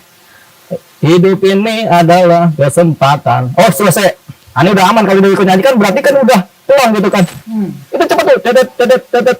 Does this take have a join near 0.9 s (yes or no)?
no